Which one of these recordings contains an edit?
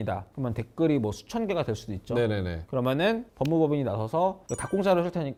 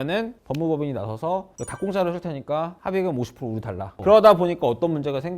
second; 1 cut; at 3.8 s

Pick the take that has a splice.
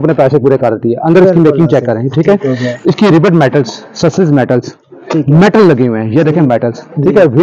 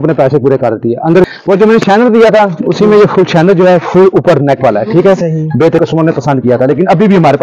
second; 2 cuts; at 1.2 s, 5.8 s

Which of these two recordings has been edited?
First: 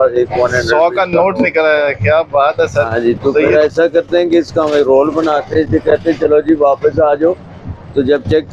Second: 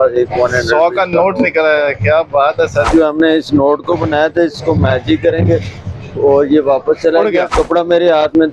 second; 2 cuts; at 2.9 s, 7.5 s

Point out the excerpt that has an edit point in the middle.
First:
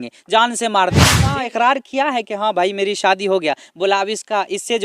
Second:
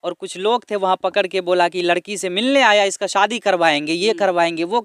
first; 1 cut; at 1.3 s

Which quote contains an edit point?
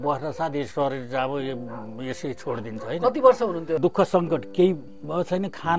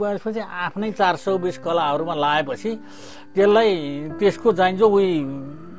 first; 1 cut; at 3.8 s

